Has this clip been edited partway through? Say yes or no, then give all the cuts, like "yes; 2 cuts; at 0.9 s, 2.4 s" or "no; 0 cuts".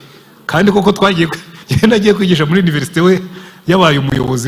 no; 0 cuts